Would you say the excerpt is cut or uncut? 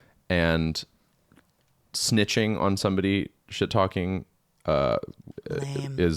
uncut